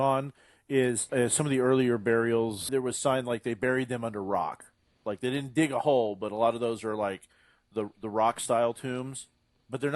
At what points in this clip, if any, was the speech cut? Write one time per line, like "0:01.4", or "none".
0:01.0
0:02.7